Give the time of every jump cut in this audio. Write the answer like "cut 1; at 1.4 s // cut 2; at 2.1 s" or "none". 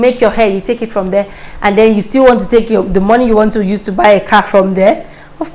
none